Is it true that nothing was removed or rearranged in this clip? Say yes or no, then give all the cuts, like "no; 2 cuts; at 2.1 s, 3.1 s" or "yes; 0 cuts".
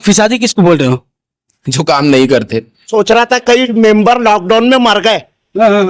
no; 1 cut; at 2.9 s